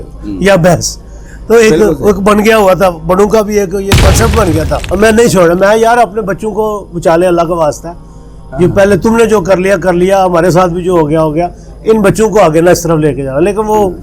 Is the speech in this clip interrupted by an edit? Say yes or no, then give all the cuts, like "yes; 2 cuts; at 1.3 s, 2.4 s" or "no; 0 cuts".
yes; 1 cut; at 4.9 s